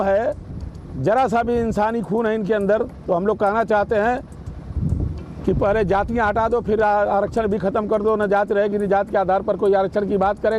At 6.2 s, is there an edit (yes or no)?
no